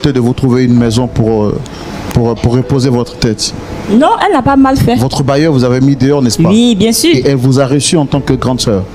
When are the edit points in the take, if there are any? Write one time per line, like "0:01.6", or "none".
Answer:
none